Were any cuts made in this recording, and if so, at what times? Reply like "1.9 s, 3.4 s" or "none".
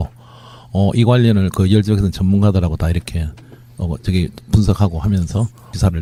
none